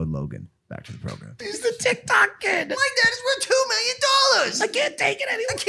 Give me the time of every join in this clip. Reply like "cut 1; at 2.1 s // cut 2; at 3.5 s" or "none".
cut 1; at 1.4 s

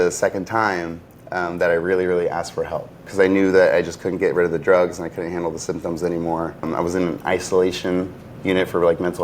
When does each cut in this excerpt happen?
cut 1; at 3.1 s // cut 2; at 6.7 s

